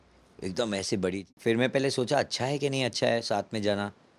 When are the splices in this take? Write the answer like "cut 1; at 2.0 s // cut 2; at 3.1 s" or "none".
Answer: cut 1; at 1.3 s